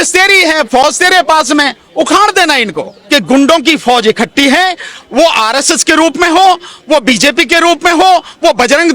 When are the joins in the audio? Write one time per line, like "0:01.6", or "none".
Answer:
0:02.9